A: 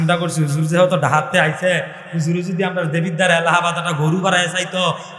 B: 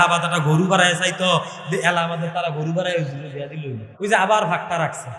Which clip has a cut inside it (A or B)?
B